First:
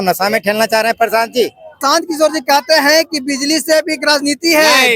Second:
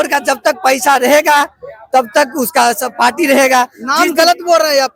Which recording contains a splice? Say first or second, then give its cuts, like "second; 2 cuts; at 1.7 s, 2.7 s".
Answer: first; 1 cut; at 1.8 s